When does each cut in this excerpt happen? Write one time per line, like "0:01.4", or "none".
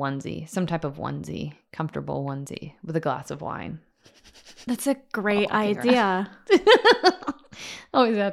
none

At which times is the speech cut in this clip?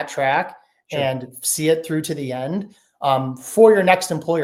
none

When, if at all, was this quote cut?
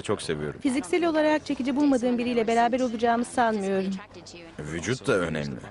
0:01.1

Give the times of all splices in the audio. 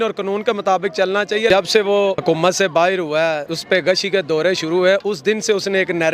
0:01.5
0:02.2
0:03.5

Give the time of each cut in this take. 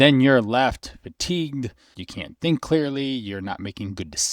0:02.0

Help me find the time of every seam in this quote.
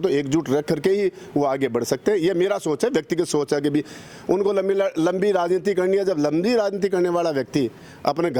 none

